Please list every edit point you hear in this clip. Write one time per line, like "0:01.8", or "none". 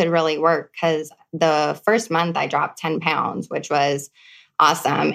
none